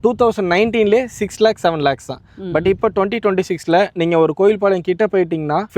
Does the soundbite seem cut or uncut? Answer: uncut